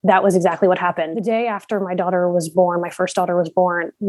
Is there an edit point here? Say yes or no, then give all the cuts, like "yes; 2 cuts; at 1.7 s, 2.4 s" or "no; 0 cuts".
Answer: yes; 1 cut; at 1.2 s